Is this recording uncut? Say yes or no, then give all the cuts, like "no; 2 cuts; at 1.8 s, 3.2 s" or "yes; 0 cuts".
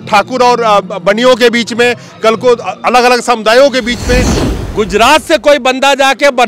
no; 1 cut; at 4.4 s